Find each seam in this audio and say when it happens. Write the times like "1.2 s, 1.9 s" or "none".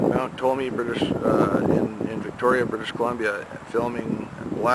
1.1 s